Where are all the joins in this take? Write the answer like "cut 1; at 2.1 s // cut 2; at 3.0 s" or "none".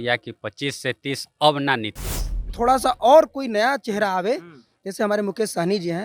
cut 1; at 2.5 s